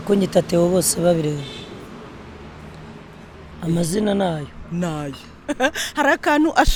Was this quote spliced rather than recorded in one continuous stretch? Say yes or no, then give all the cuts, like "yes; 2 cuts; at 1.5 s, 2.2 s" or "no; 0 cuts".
no; 0 cuts